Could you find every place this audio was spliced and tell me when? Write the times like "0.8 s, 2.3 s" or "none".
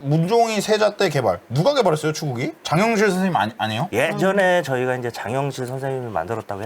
2.6 s